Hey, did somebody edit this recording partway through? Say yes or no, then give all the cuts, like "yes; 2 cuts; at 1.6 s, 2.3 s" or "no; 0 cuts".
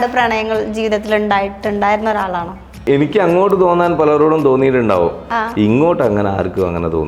yes; 1 cut; at 2.9 s